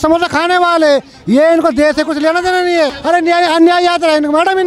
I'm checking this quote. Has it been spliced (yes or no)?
yes